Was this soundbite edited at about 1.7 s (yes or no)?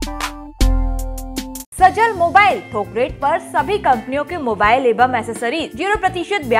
yes